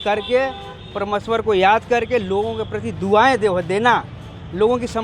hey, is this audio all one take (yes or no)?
yes